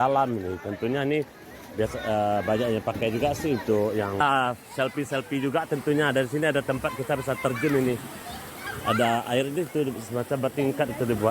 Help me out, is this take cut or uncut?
cut